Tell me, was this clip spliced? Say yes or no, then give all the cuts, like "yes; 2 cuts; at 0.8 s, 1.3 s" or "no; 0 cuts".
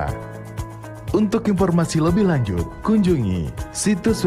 yes; 1 cut; at 3.4 s